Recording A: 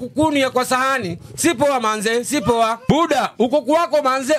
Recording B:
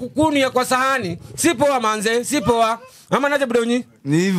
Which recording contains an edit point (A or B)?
A